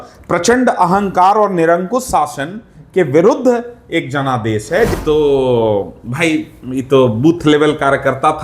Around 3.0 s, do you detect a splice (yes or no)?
no